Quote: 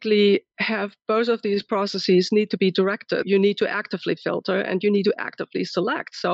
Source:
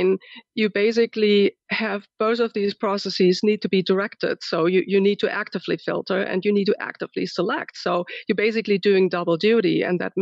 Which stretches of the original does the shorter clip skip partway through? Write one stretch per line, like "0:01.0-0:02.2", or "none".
0:04.4-0:04.9